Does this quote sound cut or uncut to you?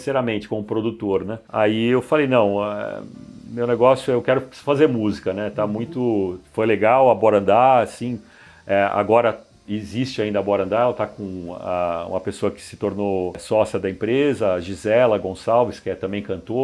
uncut